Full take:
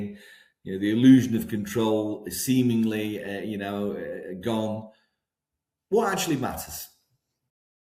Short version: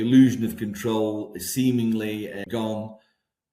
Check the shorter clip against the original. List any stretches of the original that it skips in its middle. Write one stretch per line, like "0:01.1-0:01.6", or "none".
0:03.4-0:04.4